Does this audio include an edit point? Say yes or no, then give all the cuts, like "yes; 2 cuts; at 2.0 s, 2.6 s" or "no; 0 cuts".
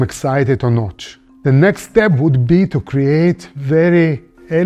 no; 0 cuts